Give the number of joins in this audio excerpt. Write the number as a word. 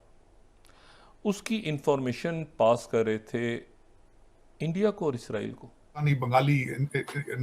one